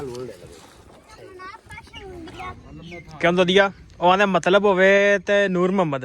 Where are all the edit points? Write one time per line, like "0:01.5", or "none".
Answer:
0:02.5